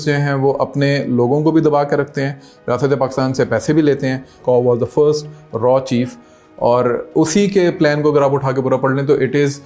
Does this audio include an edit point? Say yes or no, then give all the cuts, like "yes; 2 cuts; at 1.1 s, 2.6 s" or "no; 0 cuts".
yes; 1 cut; at 4.4 s